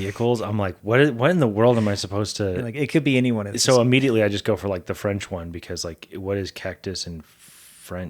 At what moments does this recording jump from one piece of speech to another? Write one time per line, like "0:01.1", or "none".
none